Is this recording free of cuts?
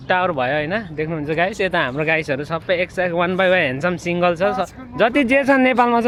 yes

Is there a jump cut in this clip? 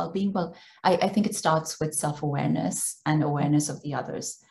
no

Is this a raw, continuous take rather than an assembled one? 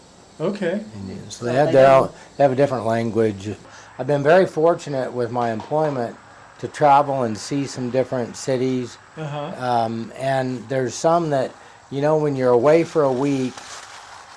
no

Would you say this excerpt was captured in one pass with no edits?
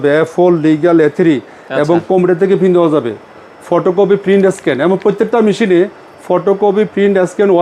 yes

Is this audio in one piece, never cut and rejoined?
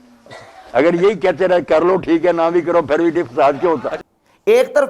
yes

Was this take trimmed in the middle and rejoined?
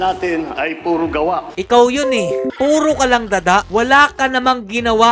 yes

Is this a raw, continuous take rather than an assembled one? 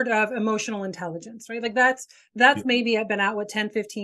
yes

